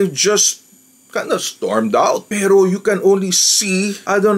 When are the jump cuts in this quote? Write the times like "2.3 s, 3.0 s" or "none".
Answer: 2.3 s